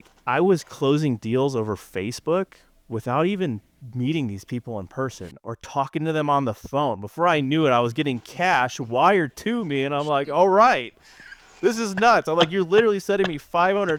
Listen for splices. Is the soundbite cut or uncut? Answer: uncut